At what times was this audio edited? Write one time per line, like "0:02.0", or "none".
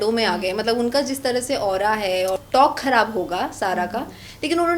0:02.4